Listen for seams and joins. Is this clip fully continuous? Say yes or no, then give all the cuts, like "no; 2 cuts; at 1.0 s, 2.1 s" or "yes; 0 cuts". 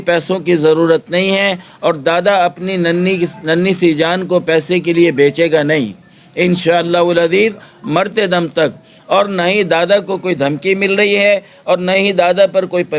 yes; 0 cuts